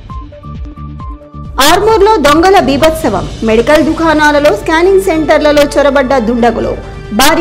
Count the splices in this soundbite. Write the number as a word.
one